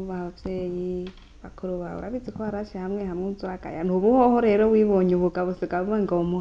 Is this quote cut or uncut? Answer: uncut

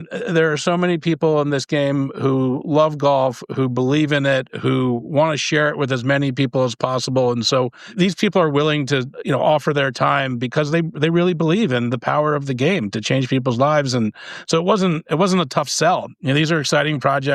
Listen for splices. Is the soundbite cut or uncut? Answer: cut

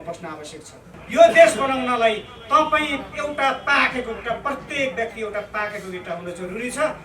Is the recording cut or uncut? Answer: cut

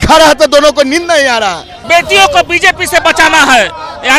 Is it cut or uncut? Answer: cut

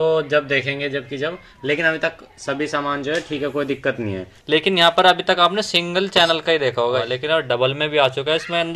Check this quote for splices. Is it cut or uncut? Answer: cut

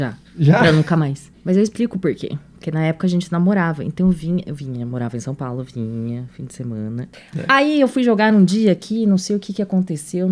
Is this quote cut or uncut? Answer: cut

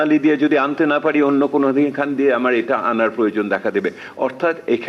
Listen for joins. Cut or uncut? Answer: uncut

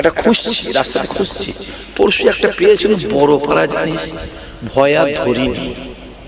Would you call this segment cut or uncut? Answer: uncut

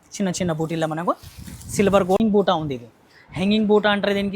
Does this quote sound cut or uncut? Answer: cut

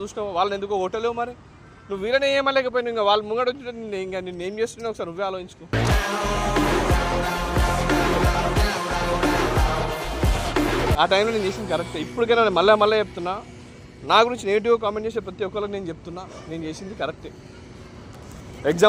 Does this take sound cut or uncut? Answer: uncut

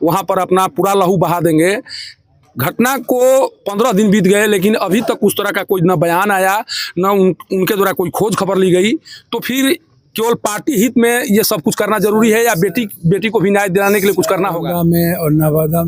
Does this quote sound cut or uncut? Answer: cut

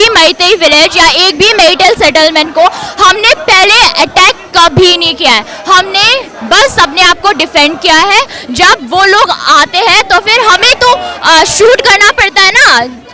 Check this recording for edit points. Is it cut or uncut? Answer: uncut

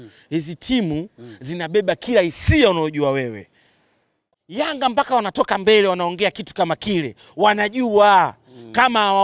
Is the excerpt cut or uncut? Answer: cut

